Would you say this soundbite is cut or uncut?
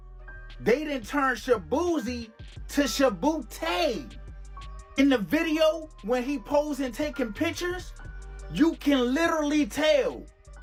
uncut